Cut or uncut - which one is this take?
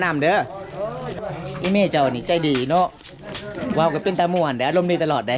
cut